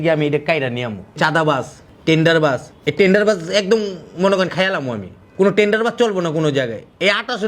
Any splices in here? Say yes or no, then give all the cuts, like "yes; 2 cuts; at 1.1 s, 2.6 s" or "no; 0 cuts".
yes; 1 cut; at 1.2 s